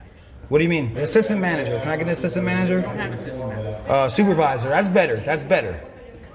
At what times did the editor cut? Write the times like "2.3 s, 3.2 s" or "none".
1.0 s, 3.8 s